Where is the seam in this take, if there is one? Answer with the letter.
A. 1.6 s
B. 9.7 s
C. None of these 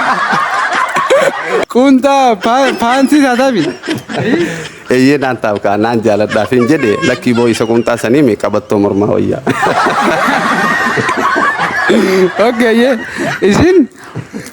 A